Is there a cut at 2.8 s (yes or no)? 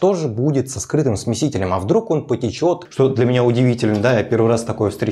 yes